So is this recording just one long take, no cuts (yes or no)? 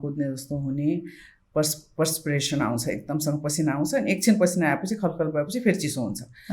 yes